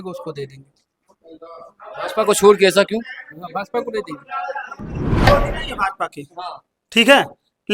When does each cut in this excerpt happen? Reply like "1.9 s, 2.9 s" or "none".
5.3 s